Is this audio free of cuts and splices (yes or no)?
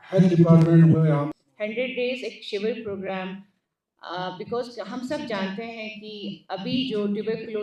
no